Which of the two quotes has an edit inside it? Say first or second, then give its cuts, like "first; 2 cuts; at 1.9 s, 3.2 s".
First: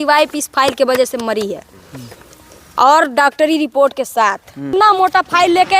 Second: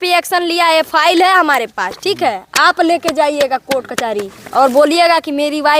first; 1 cut; at 4.7 s